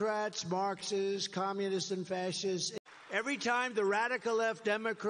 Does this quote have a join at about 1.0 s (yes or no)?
no